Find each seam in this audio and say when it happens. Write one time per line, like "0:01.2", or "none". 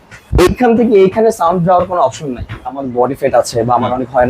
0:02.8